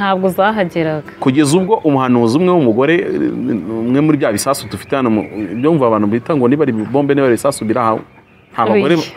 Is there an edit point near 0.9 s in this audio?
no; 0 cuts

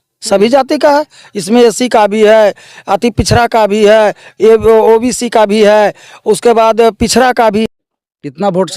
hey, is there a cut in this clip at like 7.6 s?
yes; 1 cut; at 7.6 s

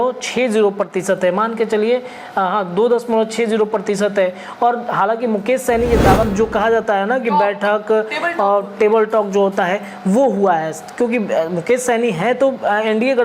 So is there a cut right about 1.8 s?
no; 1 cut; at 6.3 s

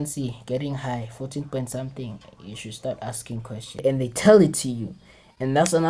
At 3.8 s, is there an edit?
yes; 1 cut; at 3.8 s

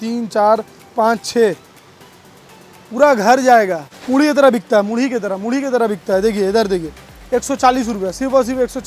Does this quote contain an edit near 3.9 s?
yes; 1 cut; at 3.9 s

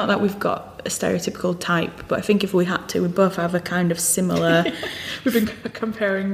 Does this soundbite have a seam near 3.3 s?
no; 0 cuts

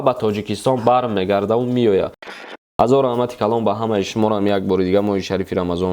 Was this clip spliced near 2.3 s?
yes; 1 cut; at 2.3 s

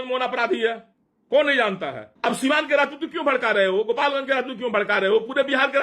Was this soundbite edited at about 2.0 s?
yes; 1 cut; at 2.0 s

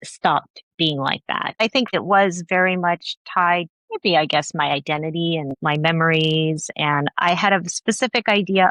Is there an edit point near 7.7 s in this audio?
no; 3 cuts; at 1.9 s, 3.8 s, 5.6 s

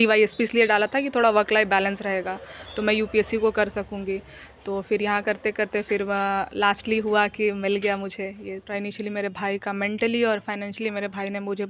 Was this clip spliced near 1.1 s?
no; 1 cut; at 8.7 s

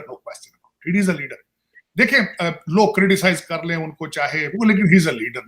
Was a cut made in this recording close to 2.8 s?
no; 1 cut; at 4.5 s

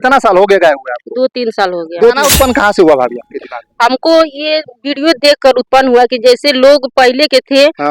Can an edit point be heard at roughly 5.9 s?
no; 1 cut; at 2.2 s

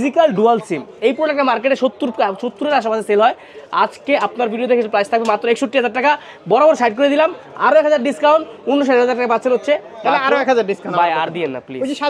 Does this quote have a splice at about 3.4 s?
no; 0 cuts

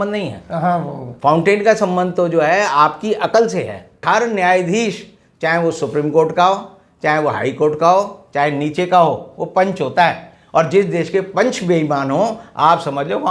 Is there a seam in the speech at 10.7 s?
no; 1 cut; at 4.0 s

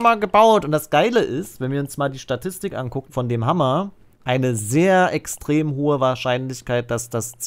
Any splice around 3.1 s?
yes; 2 cuts; at 3.1 s, 4.1 s

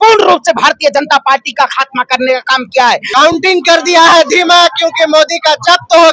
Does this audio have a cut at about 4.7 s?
no; 1 cut; at 3.1 s

